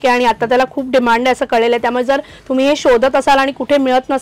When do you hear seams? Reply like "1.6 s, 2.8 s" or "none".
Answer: none